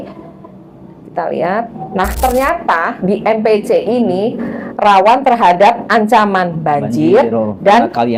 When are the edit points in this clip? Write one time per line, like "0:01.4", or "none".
none